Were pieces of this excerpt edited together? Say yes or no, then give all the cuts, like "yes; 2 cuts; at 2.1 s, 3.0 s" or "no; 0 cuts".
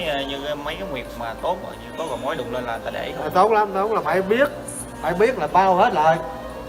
no; 0 cuts